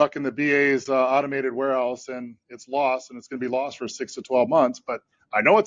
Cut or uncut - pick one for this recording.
uncut